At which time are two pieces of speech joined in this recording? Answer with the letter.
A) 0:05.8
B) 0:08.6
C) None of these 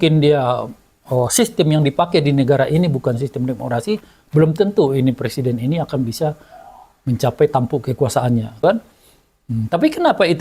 B